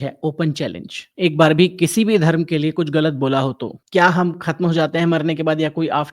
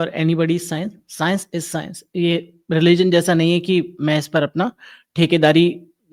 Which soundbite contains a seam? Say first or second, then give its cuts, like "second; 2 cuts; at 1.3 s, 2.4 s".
first; 2 cuts; at 1.0 s, 3.8 s